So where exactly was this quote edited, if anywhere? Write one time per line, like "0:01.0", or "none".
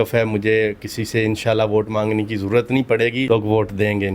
0:03.3